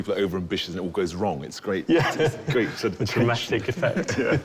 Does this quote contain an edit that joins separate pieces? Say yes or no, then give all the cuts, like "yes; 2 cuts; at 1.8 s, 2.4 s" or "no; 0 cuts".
no; 0 cuts